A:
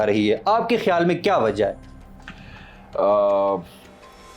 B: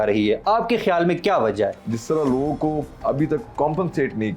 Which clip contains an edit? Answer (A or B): B